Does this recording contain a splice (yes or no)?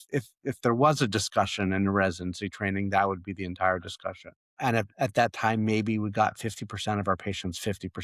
yes